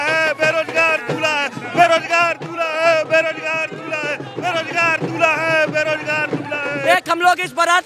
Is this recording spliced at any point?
yes; 1 cut; at 6.8 s

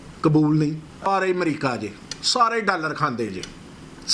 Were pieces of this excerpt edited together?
yes; 1 cut; at 1.1 s

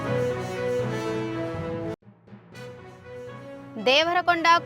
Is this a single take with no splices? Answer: no; 2 cuts; at 1.9 s, 3.5 s

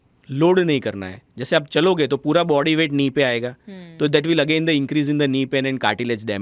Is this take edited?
no; 0 cuts

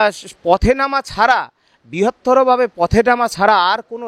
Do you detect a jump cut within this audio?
no; 0 cuts

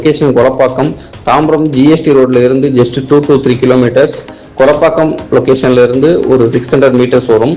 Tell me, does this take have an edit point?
no; 0 cuts

